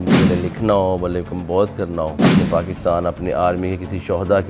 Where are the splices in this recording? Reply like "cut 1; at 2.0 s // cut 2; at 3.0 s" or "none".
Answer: cut 1; at 2.1 s